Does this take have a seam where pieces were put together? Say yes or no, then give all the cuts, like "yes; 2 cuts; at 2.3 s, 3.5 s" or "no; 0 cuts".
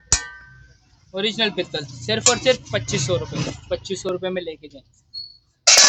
no; 0 cuts